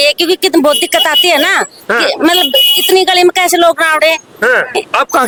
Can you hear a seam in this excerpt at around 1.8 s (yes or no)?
no